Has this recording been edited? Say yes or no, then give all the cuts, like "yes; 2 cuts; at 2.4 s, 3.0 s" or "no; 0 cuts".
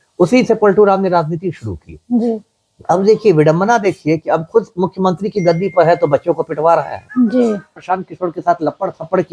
yes; 1 cut; at 7.8 s